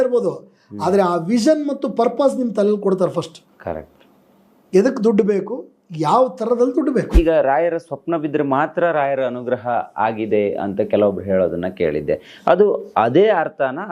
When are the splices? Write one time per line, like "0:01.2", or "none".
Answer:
0:07.1

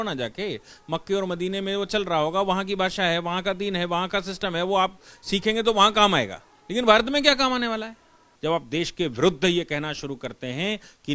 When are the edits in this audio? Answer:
0:08.3

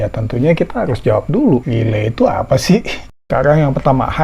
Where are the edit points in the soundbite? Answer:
0:03.0

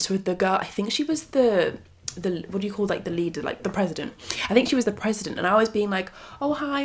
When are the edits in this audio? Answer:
none

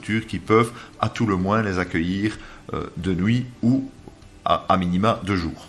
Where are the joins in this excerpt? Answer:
none

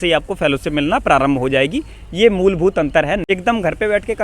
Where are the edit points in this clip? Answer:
0:03.2

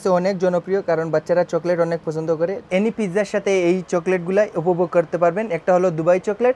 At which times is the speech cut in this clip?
0:02.6

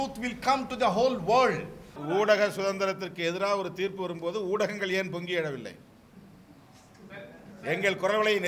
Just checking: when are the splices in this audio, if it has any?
0:01.9

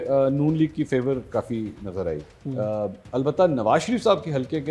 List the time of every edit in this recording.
none

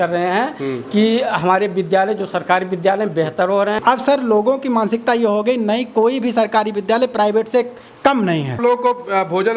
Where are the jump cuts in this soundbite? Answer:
0:03.8
0:08.6

